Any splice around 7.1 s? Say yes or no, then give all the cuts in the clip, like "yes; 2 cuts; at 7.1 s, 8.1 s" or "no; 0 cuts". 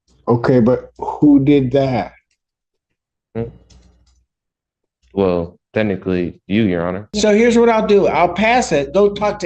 yes; 1 cut; at 7.1 s